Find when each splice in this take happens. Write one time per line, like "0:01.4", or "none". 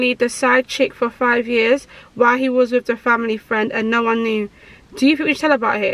none